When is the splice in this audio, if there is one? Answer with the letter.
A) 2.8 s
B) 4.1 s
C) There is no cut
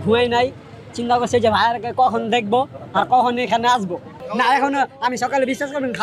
B